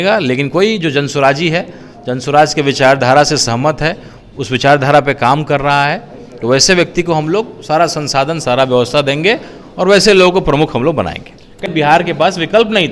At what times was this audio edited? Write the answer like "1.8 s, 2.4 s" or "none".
11.7 s

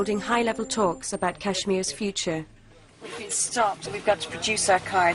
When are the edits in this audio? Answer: 1.2 s

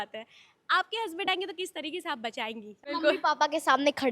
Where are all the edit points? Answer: 2.9 s

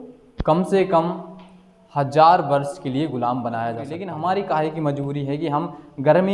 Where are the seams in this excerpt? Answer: 4.0 s

